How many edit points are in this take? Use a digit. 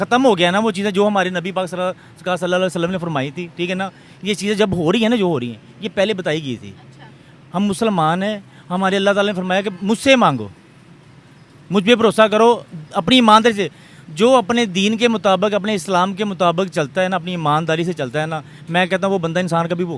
0